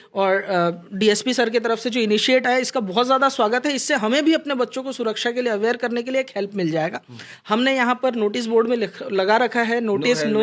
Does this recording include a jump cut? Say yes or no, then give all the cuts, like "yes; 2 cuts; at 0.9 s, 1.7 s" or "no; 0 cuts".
no; 0 cuts